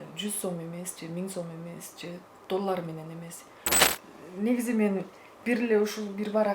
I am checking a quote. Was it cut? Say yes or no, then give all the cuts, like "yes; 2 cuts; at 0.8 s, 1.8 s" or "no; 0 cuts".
yes; 1 cut; at 3.9 s